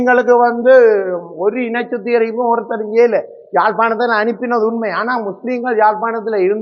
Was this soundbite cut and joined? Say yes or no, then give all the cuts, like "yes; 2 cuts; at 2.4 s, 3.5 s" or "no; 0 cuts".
no; 0 cuts